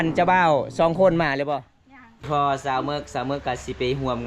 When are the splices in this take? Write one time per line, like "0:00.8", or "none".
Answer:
0:02.3